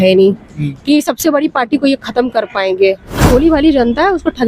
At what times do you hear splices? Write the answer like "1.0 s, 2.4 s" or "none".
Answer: 3.2 s